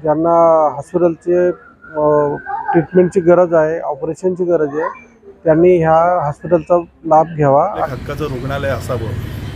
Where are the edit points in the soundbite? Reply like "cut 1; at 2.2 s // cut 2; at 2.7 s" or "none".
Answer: cut 1; at 7.9 s

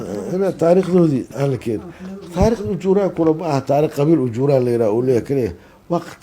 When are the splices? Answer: cut 1; at 1.3 s

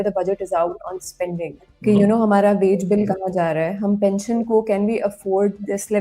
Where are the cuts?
cut 1; at 1.6 s

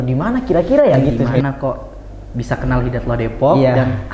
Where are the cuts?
cut 1; at 1.3 s

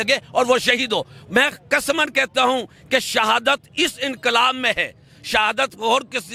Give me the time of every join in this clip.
none

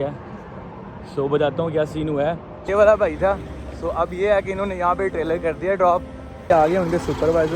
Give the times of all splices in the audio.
cut 1; at 2.5 s // cut 2; at 6.5 s

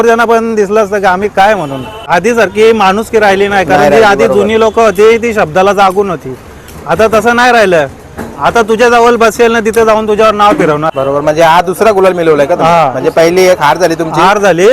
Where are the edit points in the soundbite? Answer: cut 1; at 2.0 s // cut 2; at 10.8 s

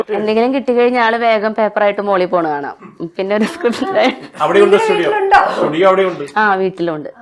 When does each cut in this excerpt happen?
none

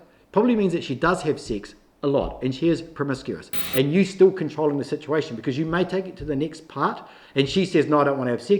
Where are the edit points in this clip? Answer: cut 1; at 3.6 s

